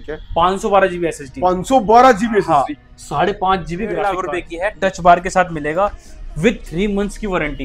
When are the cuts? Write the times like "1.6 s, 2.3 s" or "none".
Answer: 4.2 s